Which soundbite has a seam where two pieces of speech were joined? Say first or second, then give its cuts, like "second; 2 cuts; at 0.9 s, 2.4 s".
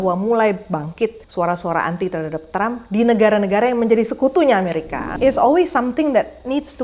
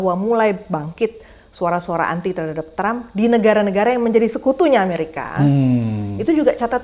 first; 2 cuts; at 1.2 s, 5.0 s